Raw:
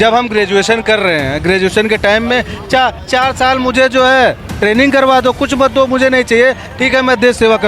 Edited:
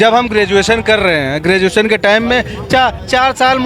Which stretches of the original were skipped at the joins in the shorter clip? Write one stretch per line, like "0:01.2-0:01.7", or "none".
none